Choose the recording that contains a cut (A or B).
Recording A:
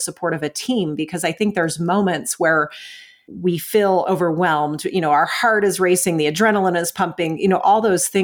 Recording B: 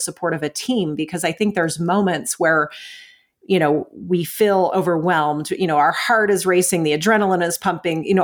A